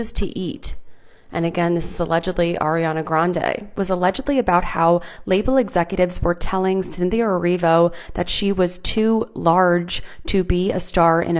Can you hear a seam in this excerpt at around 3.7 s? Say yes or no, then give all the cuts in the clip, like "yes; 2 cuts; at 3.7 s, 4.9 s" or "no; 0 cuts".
yes; 1 cut; at 3.7 s